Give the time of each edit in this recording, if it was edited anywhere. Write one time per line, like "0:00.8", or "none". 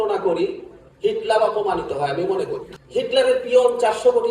0:02.7

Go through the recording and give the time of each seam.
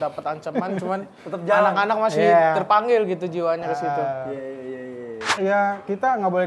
0:05.3

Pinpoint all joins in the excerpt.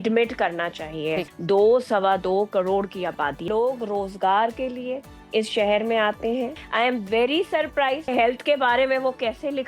0:01.3
0:03.4
0:06.6
0:08.1

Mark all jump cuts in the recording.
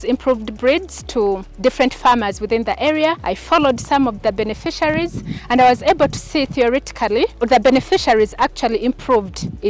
0:01.5
0:03.3
0:07.4

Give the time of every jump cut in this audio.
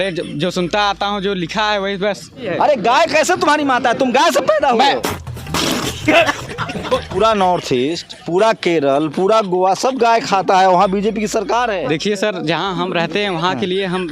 0:02.4
0:05.0
0:07.1
0:11.8

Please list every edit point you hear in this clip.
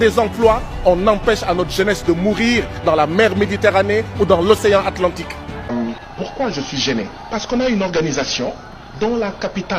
0:05.6

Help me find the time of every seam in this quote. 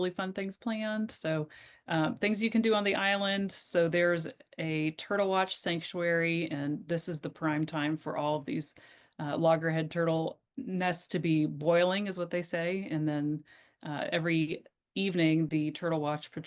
none

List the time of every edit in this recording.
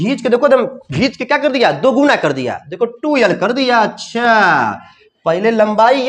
none

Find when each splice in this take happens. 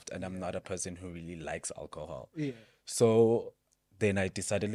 none

